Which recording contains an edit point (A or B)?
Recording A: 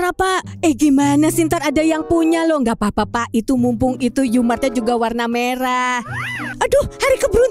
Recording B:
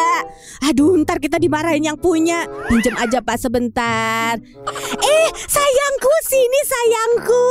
A